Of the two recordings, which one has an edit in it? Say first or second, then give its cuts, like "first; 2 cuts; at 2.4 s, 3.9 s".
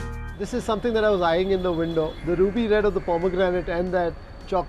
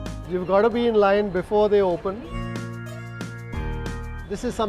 second; 1 cut; at 2.3 s